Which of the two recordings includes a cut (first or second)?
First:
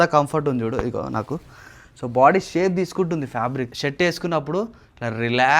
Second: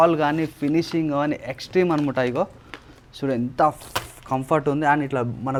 first